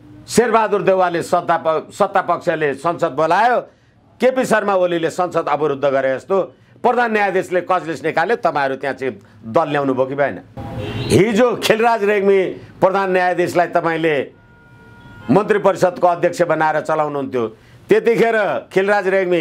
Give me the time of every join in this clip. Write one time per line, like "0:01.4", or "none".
0:10.5